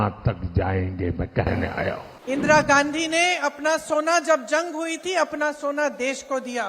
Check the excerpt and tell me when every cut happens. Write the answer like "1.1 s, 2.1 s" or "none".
2.1 s